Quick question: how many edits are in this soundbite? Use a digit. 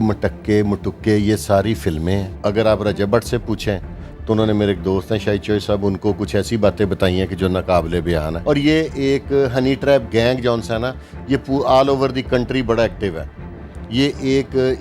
2